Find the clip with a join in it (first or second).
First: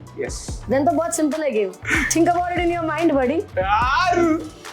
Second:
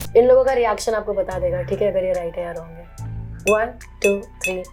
first